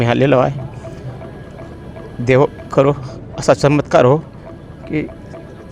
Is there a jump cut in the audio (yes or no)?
no